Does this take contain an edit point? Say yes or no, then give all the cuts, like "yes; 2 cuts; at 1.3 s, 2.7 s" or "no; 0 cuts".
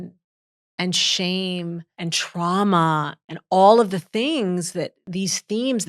yes; 2 cuts; at 1.9 s, 3.2 s